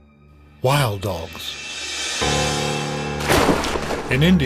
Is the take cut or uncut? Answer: uncut